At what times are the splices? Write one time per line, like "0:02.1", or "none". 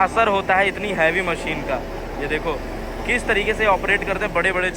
none